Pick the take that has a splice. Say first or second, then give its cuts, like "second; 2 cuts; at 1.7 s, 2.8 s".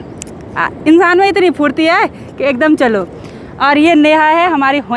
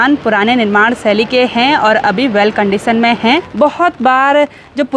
second; 1 cut; at 3.5 s